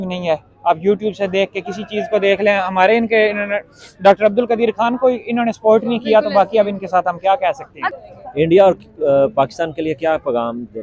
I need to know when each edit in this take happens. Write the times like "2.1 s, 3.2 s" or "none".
7.9 s